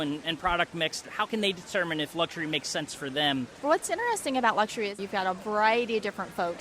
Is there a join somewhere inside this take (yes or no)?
yes